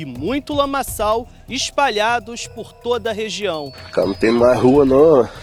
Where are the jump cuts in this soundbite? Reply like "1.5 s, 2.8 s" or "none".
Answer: none